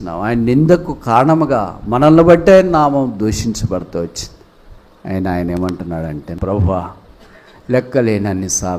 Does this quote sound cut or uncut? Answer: cut